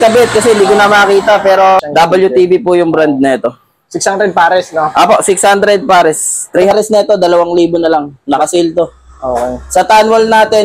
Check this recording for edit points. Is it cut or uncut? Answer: cut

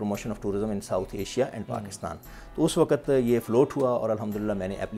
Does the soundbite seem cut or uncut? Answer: uncut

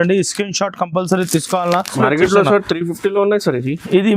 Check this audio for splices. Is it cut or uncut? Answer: cut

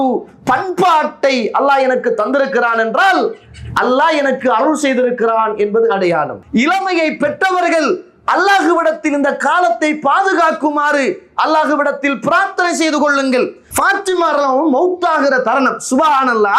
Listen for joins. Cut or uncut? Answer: cut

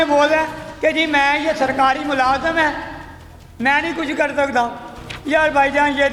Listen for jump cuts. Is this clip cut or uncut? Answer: uncut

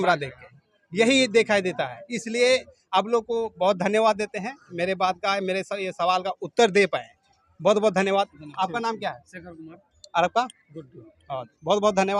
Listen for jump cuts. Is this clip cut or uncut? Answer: uncut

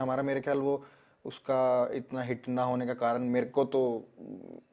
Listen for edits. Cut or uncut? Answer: uncut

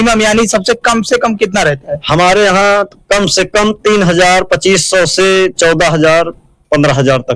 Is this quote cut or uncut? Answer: uncut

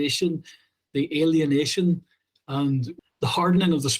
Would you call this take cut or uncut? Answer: cut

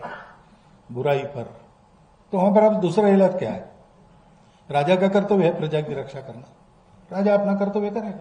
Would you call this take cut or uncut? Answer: uncut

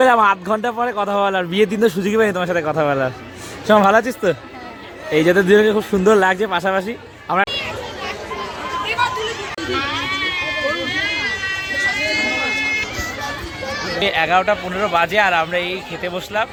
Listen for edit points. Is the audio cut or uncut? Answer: uncut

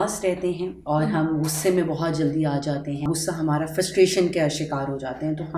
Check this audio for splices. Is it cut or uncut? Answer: cut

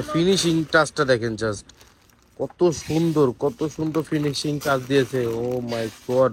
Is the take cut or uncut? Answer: uncut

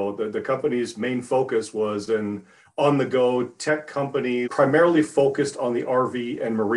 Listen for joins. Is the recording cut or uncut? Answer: cut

